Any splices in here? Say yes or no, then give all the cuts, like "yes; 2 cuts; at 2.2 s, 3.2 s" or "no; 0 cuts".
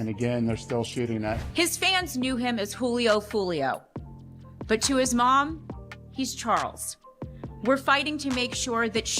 yes; 1 cut; at 1.4 s